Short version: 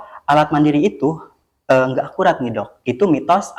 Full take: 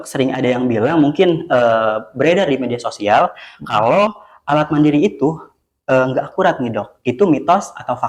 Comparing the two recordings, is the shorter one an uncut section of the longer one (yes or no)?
yes